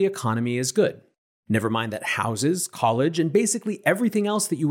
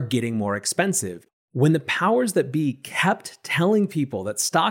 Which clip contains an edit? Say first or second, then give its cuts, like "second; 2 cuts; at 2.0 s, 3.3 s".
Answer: second; 1 cut; at 1.2 s